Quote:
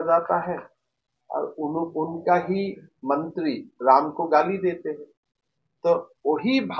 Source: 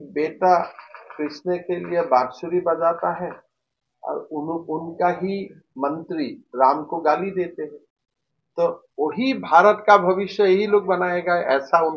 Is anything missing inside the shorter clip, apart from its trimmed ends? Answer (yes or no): no